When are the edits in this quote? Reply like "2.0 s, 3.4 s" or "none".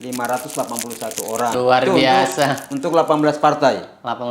1.5 s